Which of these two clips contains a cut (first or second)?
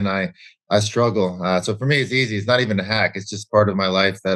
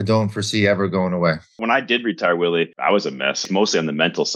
second